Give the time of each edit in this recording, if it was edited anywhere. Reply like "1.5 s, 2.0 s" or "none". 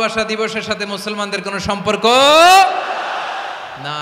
none